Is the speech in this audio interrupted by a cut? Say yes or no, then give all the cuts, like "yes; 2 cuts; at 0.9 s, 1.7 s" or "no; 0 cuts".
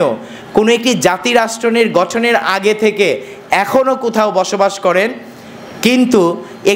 no; 0 cuts